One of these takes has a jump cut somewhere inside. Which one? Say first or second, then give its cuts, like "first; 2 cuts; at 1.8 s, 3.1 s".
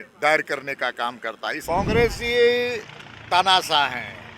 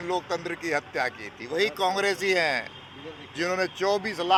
first; 1 cut; at 1.6 s